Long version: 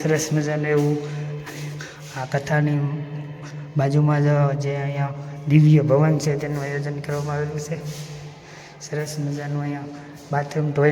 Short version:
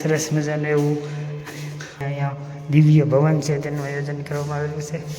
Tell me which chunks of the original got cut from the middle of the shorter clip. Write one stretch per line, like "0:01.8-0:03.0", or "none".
0:02.0-0:04.8